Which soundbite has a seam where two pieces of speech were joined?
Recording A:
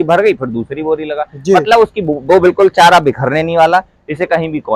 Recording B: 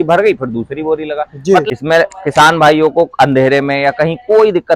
B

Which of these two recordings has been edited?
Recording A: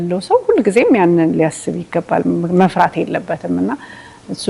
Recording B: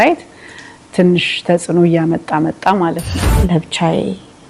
B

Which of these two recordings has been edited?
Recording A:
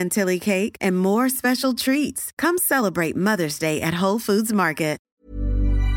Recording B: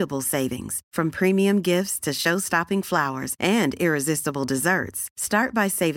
A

